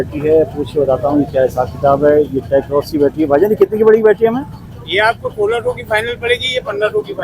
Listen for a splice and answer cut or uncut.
uncut